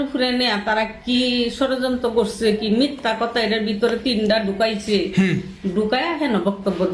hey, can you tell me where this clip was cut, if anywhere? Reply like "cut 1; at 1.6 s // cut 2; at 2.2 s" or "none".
none